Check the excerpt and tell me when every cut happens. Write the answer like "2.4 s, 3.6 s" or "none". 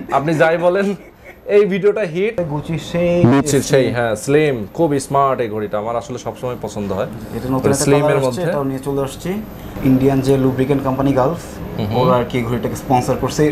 2.4 s, 9.7 s